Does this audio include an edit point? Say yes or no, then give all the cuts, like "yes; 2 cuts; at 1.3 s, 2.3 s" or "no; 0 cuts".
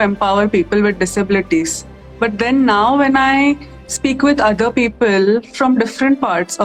no; 0 cuts